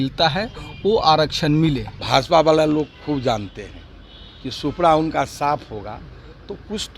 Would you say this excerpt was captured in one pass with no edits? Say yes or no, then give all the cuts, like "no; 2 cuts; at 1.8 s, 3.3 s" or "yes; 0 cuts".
no; 1 cut; at 1.9 s